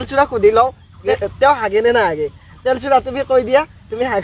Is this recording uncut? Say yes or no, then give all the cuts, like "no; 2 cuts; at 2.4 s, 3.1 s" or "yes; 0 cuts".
no; 1 cut; at 1.0 s